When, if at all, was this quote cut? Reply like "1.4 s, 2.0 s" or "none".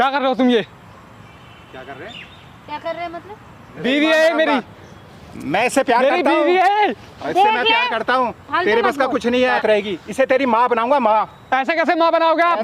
3.8 s, 9.5 s

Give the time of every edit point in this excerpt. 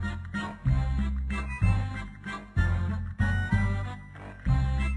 none

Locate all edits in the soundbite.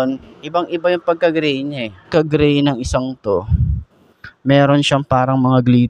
2.1 s

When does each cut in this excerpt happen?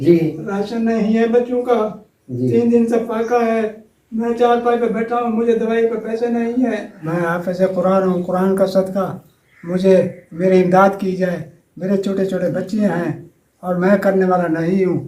6.9 s

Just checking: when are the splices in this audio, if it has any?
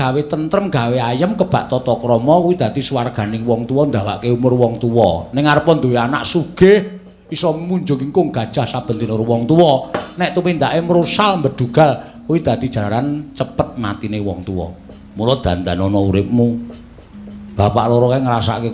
none

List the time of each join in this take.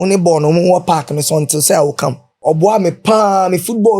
2.3 s

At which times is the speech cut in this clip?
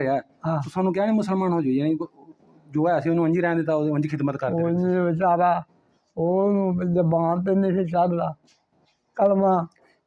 none

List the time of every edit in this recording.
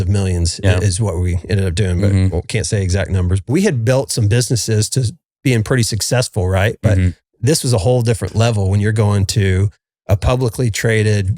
3.5 s

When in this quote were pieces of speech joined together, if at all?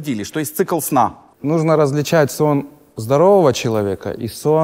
1.3 s

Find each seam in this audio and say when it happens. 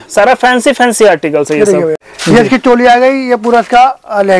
2.1 s

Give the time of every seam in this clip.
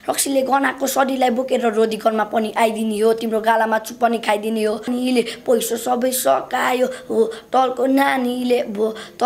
4.9 s

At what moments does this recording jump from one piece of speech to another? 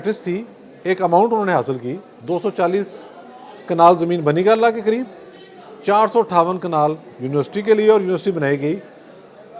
none

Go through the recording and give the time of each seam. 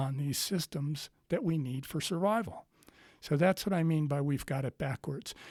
none

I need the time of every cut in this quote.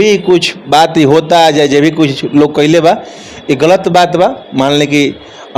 none

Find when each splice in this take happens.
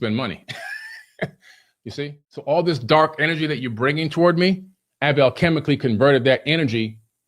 2.2 s

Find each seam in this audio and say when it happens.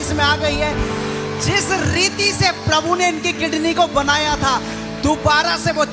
none

